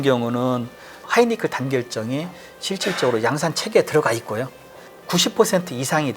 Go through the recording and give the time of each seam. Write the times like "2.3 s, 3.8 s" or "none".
none